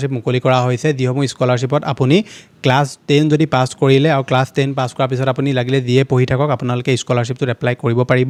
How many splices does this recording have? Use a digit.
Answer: 0